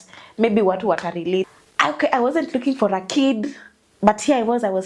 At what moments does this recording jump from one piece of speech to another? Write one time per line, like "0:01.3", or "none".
0:01.5